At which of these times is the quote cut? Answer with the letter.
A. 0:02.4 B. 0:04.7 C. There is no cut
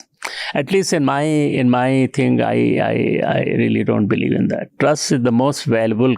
B